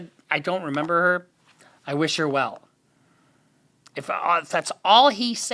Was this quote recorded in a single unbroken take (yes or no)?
yes